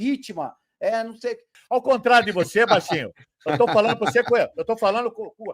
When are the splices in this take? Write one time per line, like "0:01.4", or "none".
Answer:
0:01.6